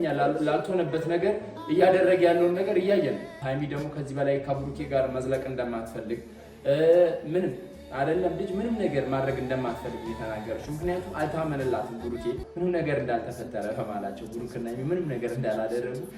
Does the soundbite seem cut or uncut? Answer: cut